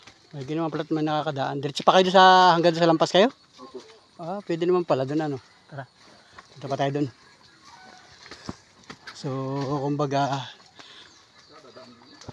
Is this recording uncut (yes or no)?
yes